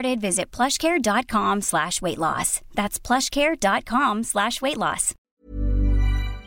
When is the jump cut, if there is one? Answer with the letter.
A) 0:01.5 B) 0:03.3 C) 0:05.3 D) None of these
C